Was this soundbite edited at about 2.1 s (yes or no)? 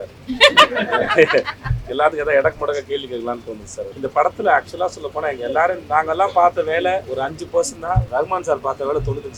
no